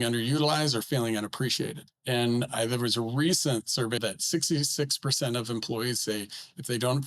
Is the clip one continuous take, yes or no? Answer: no